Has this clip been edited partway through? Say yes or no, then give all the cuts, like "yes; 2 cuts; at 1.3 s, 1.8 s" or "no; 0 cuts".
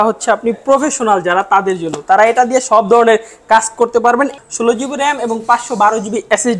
yes; 1 cut; at 4.4 s